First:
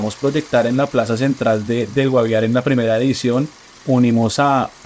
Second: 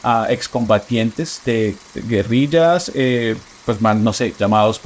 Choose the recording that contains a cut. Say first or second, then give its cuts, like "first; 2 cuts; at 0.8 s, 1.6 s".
second; 1 cut; at 1.5 s